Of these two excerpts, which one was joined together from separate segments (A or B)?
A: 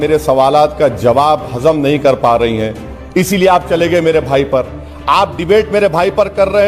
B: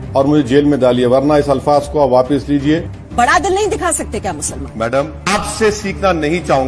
B